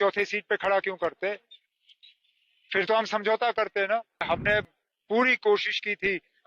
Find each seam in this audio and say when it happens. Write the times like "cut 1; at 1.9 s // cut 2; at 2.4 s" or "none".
cut 1; at 4.2 s